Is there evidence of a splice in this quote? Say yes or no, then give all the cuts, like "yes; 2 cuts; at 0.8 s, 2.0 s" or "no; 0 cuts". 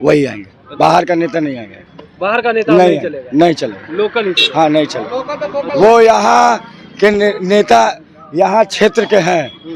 no; 0 cuts